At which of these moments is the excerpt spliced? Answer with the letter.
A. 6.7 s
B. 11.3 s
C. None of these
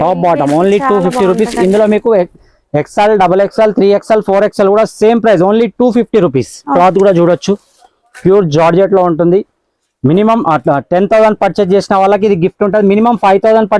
A